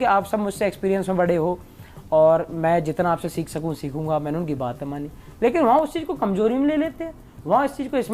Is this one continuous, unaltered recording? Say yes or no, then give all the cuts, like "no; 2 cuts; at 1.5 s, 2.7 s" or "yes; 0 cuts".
yes; 0 cuts